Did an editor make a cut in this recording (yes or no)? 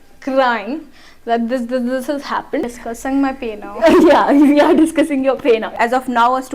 yes